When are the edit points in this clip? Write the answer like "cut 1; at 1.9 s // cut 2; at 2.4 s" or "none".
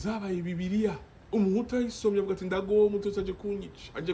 cut 1; at 1.1 s